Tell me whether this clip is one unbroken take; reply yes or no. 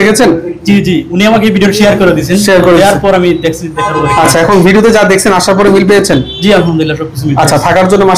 yes